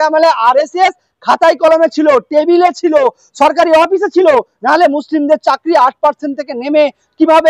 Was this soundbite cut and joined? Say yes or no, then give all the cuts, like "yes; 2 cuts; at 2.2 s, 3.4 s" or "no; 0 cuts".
no; 0 cuts